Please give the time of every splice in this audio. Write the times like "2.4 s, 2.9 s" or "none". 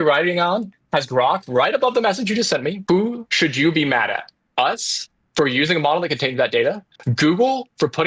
2.8 s, 4.4 s